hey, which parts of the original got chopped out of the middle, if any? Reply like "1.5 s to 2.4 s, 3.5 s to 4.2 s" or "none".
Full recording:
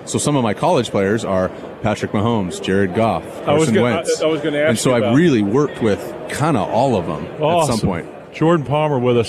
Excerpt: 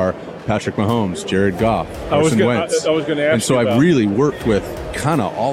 none